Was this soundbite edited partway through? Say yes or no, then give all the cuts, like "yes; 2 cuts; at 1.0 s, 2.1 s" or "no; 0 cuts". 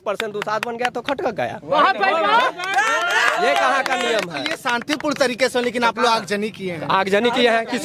no; 0 cuts